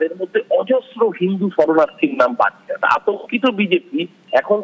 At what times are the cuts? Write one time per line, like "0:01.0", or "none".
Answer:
0:02.8